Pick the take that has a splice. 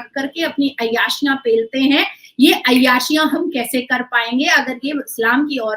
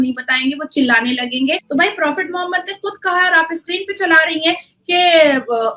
second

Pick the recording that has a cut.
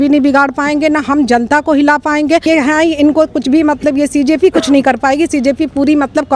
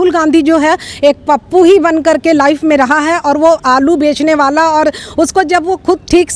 first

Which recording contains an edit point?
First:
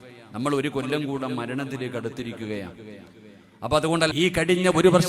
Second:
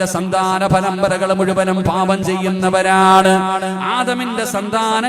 first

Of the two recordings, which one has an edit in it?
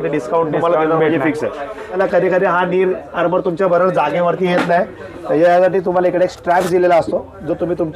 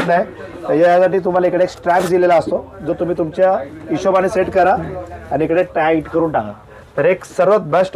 first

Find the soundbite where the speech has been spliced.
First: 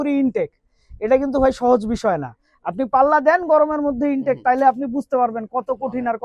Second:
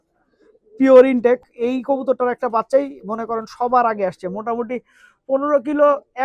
second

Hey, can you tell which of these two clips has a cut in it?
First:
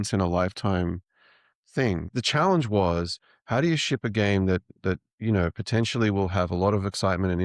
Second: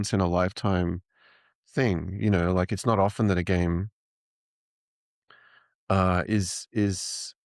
first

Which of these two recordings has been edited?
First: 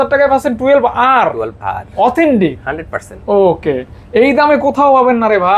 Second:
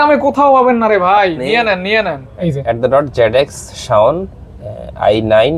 second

